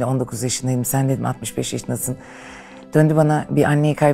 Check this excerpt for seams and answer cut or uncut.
uncut